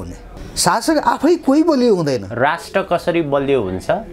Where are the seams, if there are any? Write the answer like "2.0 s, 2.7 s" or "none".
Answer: none

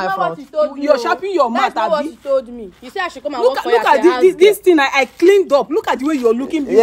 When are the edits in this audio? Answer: none

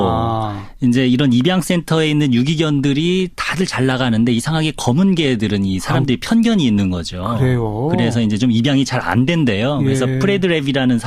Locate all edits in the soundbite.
8.7 s

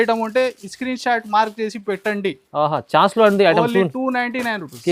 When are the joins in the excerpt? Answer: none

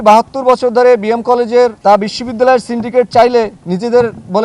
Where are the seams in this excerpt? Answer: 1.8 s

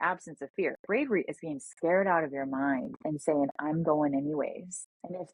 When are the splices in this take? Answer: none

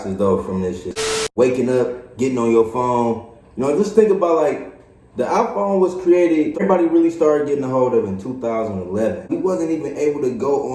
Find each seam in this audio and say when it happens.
0.9 s, 6.6 s, 9.3 s

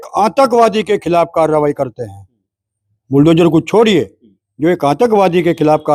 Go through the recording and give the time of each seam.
none

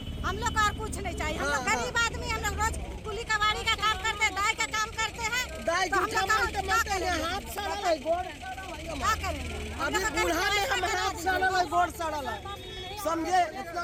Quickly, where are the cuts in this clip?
none

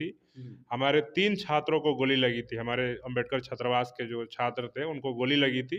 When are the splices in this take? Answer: none

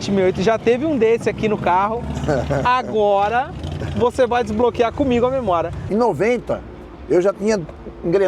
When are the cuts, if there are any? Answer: 5.8 s

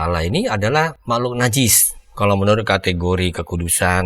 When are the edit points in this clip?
1.0 s

